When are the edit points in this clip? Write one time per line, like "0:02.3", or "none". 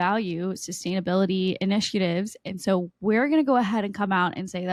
none